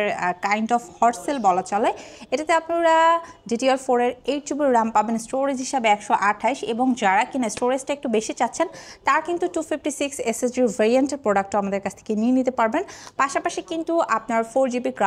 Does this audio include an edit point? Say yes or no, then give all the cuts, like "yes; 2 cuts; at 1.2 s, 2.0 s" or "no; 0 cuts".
no; 0 cuts